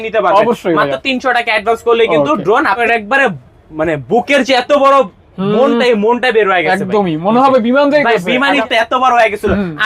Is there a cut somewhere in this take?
yes; 2 cuts; at 2.8 s, 8.6 s

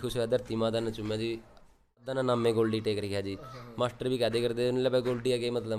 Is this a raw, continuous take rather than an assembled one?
no; 1 cut; at 2.1 s

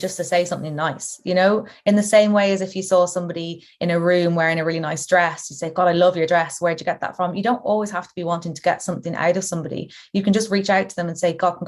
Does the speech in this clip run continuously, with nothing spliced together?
yes; 0 cuts

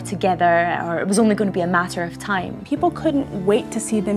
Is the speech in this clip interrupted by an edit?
yes; 1 cut; at 2.6 s

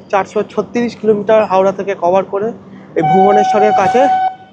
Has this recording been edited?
no; 0 cuts

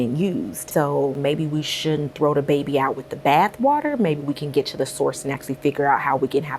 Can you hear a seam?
yes; 1 cut; at 1.0 s

